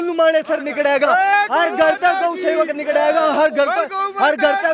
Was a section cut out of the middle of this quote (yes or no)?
no